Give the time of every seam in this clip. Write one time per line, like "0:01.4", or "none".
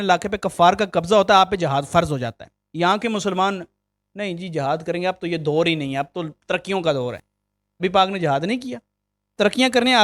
none